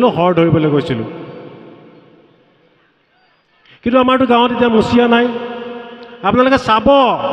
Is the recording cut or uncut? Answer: uncut